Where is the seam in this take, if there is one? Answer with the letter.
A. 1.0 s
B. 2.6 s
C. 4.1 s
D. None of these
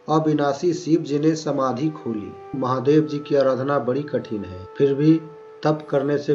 B